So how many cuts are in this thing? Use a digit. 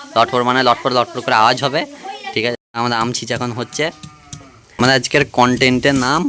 2